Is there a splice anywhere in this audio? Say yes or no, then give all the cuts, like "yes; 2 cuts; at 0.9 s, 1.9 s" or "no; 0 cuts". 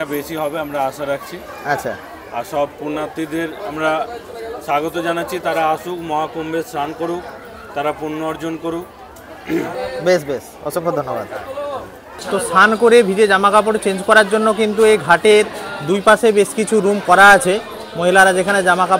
no; 0 cuts